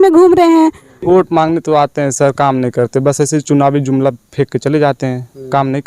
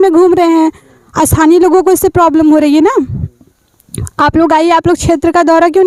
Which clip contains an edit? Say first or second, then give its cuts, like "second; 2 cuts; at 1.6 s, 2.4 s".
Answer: first; 1 cut; at 0.9 s